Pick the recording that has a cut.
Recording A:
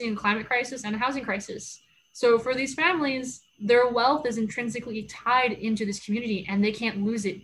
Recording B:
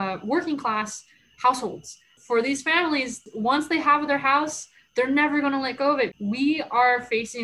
B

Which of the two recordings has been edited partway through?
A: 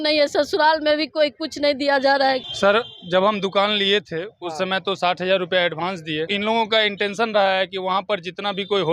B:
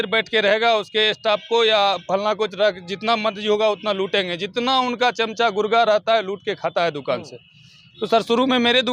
A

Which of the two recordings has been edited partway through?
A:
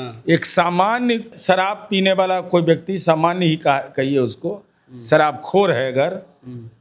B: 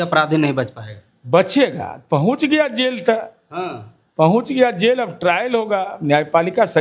A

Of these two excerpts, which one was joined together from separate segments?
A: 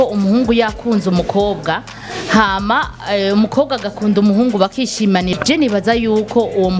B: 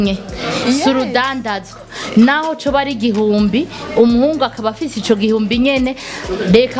A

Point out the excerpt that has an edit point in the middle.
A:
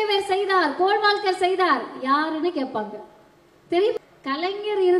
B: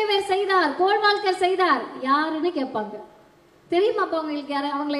A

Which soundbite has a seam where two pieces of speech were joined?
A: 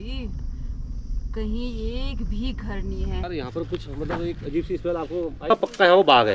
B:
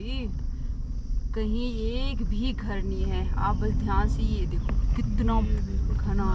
A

